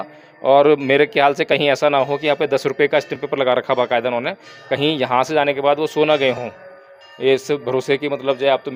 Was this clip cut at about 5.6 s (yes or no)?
no